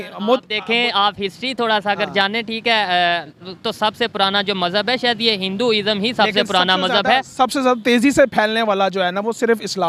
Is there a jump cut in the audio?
no; 0 cuts

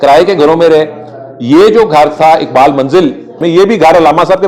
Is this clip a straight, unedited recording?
no; 1 cut; at 3.4 s

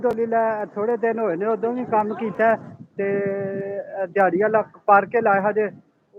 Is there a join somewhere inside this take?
no; 0 cuts

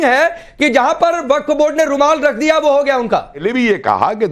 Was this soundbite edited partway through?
yes; 1 cut; at 3.4 s

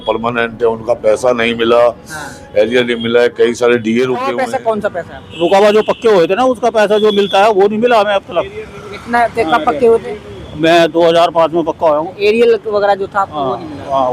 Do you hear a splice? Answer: yes; 1 cut; at 4.4 s

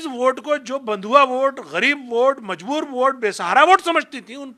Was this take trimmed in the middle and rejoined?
no; 0 cuts

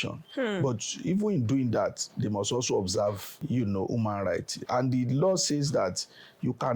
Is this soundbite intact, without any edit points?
no; 1 cut; at 3.3 s

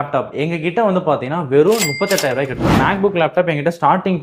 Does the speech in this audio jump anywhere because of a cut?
yes; 1 cut; at 2.7 s

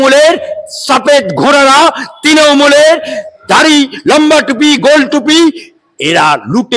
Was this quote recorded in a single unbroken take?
yes; 0 cuts

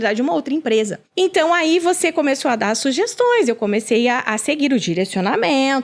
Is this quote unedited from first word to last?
no; 1 cut; at 1.0 s

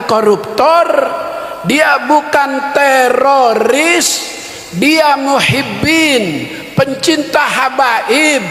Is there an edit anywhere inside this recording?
no; 0 cuts

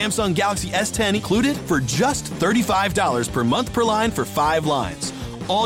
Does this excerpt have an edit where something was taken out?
yes; 1 cut; at 1.2 s

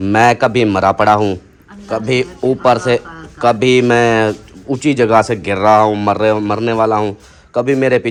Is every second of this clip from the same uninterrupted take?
yes; 0 cuts

